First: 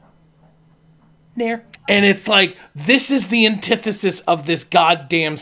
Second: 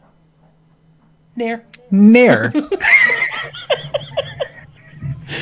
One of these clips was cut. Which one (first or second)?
first